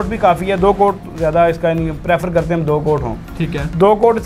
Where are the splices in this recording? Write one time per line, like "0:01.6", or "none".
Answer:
none